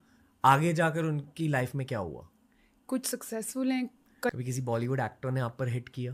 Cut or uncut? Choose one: cut